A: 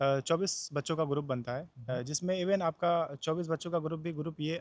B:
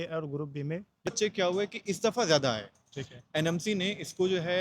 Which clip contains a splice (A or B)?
B